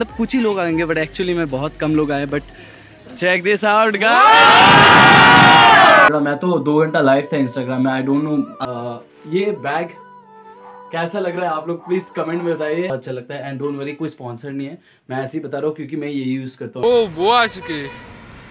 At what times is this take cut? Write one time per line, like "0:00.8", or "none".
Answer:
0:06.1
0:08.6
0:12.9
0:16.8